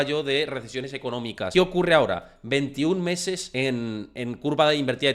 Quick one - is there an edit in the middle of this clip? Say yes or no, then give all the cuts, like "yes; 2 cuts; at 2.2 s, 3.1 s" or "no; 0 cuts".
yes; 2 cuts; at 1.5 s, 3.5 s